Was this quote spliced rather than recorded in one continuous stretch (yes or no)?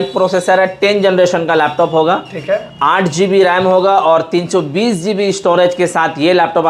no